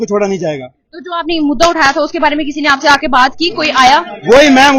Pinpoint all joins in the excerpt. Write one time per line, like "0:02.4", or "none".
none